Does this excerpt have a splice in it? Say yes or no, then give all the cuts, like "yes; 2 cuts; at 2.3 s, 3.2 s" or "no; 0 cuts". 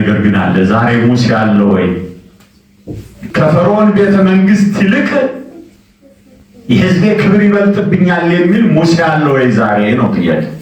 yes; 1 cut; at 3.2 s